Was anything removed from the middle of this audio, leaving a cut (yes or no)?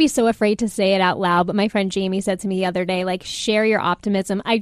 no